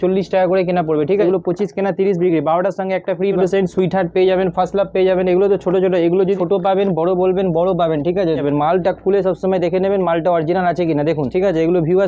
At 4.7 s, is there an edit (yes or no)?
no